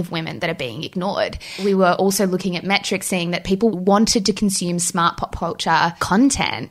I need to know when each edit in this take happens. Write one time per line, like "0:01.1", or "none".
0:01.6
0:03.7